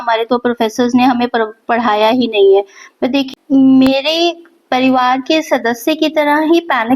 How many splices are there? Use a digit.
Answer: 1